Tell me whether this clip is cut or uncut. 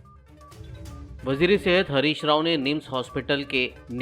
uncut